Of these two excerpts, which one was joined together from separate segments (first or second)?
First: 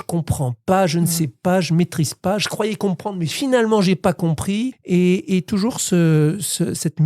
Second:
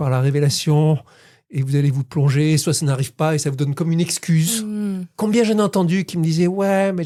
first